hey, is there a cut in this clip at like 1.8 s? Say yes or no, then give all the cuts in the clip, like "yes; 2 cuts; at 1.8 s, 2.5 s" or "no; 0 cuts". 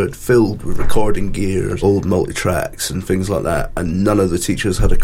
yes; 1 cut; at 1.8 s